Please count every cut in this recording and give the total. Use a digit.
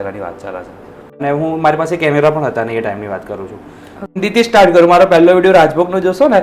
2